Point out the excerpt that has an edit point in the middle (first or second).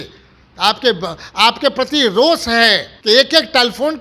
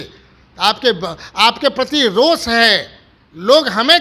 first